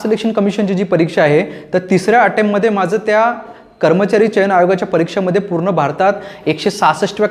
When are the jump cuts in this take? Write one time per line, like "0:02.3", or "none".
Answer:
none